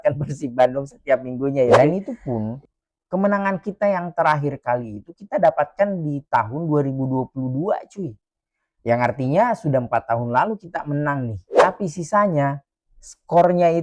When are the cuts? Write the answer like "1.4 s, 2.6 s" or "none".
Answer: 1.8 s, 11.4 s

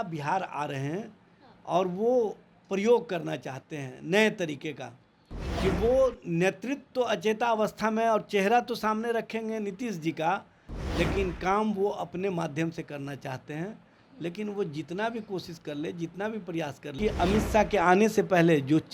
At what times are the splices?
17.0 s

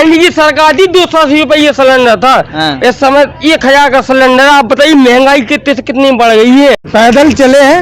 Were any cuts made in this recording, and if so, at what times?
6.8 s

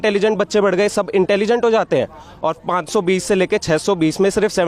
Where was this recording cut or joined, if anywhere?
none

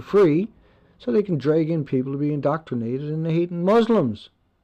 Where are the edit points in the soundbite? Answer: none

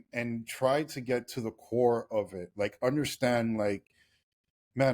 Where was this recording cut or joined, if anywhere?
none

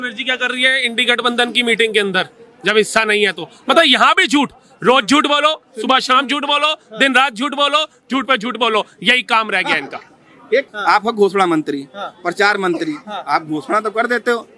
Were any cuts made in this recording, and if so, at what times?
10.7 s

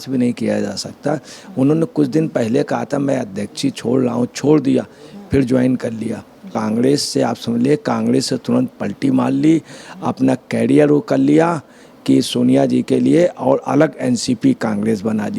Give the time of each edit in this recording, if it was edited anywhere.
6.5 s

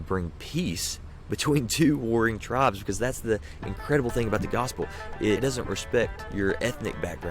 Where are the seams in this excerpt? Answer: 5.4 s, 6.2 s

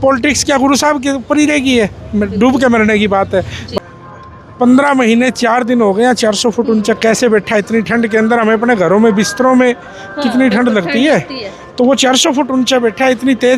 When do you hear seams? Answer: 3.7 s

